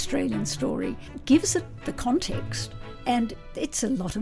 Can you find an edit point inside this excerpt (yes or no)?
yes